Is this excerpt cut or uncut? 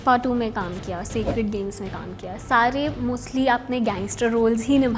uncut